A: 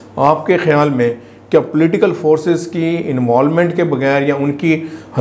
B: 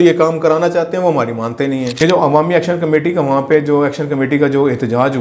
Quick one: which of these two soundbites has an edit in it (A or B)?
B